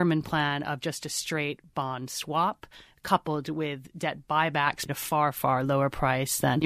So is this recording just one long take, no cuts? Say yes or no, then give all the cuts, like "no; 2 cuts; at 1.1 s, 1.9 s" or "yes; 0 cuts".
no; 1 cut; at 4.9 s